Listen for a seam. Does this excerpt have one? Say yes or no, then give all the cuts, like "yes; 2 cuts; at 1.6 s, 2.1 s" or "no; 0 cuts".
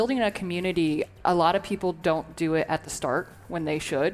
yes; 1 cut; at 1.1 s